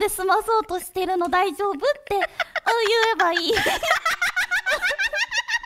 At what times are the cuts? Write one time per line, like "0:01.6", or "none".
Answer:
none